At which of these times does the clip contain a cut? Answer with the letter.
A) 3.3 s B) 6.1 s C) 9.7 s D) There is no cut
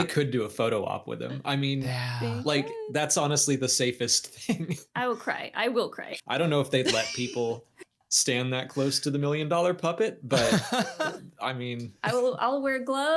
B